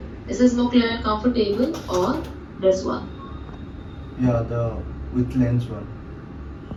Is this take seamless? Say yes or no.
yes